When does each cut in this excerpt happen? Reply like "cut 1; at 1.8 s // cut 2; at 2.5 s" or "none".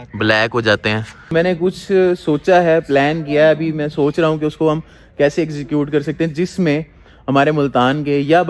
cut 1; at 1.2 s